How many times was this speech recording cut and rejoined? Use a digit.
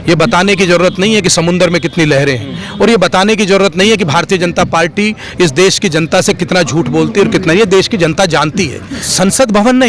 1